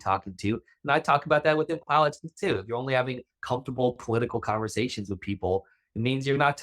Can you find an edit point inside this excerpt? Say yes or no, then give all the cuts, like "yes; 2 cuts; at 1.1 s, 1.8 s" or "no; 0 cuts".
no; 0 cuts